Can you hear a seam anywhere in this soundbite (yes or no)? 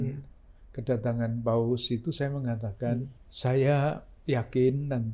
yes